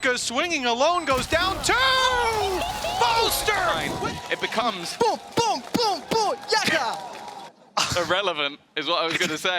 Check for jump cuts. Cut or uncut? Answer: cut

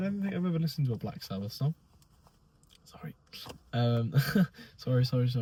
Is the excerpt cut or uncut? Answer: uncut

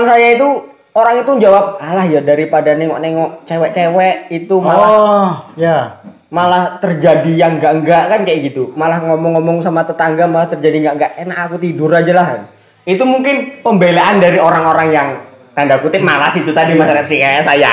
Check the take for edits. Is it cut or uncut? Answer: uncut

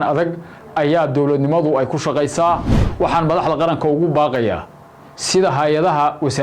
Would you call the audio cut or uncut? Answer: cut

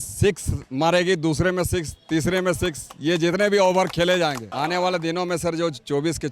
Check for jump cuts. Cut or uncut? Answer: cut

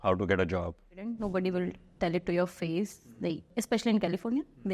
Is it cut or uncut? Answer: cut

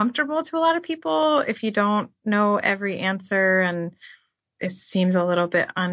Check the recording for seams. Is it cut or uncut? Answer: cut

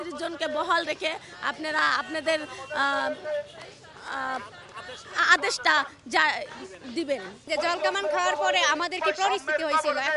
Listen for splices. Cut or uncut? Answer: cut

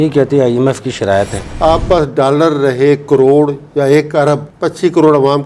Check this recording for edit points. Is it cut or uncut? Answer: cut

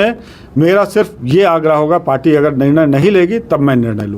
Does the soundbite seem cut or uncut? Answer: uncut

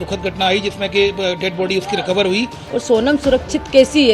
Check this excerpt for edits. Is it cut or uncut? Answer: cut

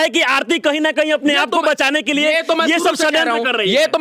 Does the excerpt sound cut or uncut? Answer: uncut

